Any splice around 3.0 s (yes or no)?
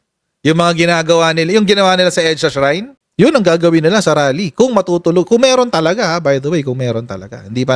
yes